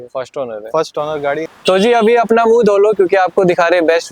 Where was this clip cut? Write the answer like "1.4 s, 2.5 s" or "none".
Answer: 1.4 s